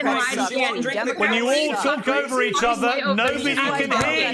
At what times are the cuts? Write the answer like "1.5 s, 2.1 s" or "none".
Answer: none